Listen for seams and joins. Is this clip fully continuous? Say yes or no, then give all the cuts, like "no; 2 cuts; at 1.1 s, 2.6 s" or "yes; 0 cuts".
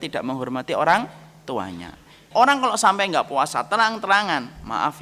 no; 1 cut; at 2.2 s